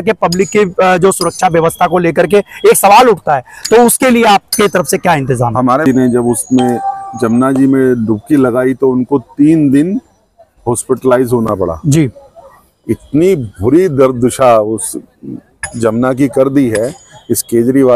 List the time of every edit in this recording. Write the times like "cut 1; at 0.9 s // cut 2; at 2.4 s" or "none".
cut 1; at 5.9 s